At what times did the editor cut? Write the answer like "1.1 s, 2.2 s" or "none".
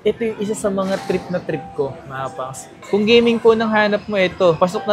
2.8 s